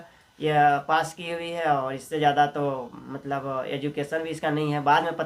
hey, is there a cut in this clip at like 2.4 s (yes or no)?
no